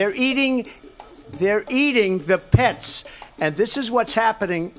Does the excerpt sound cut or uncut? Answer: cut